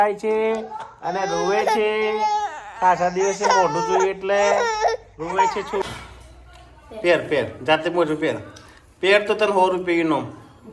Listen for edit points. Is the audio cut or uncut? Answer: cut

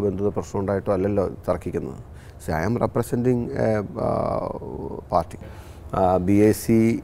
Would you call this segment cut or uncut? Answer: cut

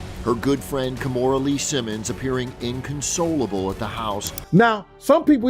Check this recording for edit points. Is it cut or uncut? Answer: cut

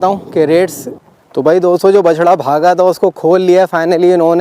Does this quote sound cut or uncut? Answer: cut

